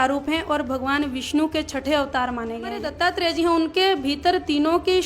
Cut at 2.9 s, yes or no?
yes